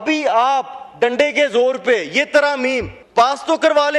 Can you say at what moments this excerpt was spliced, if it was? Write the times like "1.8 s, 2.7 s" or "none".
3.0 s